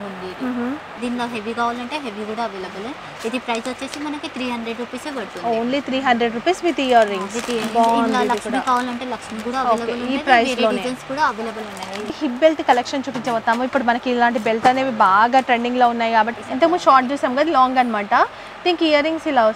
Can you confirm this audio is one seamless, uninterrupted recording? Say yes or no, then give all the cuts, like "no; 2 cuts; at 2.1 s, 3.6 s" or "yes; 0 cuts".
no; 3 cuts; at 0.9 s, 12.1 s, 16.4 s